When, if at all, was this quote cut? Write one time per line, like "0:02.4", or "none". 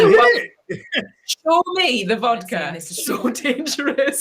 0:02.8

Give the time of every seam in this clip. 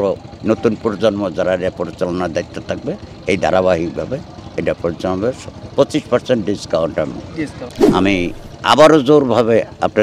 0:07.7

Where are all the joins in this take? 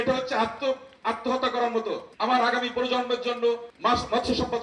0:02.1
0:03.7

